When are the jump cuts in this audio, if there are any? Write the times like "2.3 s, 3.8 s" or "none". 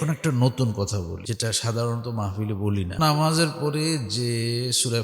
1.2 s, 3.0 s